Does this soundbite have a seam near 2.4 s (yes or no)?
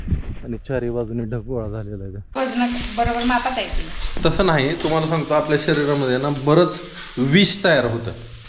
yes